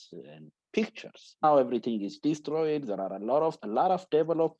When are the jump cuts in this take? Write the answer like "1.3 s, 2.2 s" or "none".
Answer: 1.4 s, 3.6 s